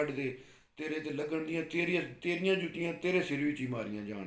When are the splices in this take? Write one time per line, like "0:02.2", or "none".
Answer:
none